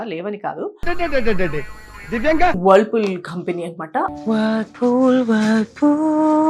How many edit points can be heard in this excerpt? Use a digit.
2